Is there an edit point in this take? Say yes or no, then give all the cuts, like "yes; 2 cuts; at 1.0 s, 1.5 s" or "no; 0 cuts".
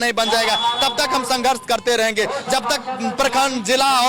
no; 0 cuts